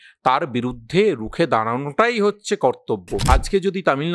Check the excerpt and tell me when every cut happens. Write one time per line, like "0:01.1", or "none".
0:03.1